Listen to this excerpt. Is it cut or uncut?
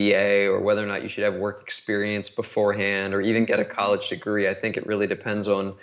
uncut